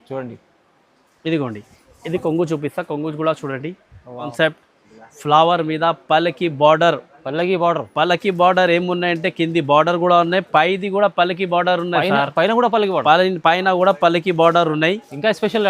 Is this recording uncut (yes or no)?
no